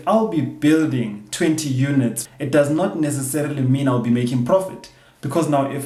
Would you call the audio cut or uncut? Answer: uncut